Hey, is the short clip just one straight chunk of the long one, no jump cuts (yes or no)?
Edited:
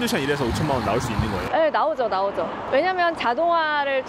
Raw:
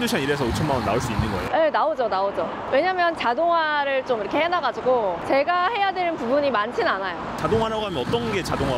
yes